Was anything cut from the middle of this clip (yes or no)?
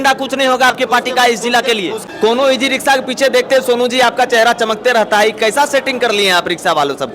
yes